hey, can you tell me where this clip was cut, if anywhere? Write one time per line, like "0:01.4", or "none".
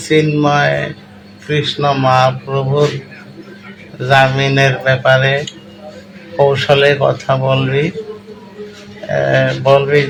none